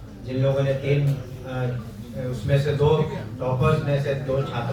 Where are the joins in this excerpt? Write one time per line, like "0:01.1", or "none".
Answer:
none